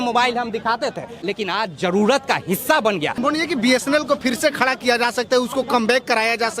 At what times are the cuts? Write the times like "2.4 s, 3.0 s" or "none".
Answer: 1.1 s, 3.2 s